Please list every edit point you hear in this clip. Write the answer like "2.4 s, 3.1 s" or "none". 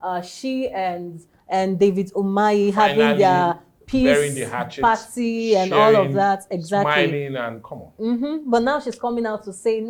none